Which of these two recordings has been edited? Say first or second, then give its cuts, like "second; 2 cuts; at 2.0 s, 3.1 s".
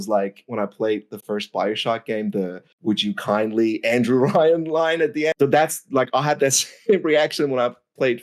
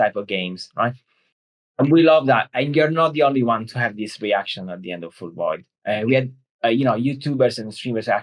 first; 1 cut; at 5.3 s